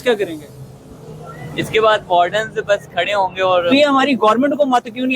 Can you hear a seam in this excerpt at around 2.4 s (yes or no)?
no